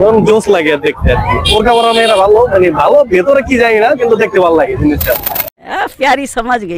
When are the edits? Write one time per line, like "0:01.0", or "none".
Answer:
0:05.5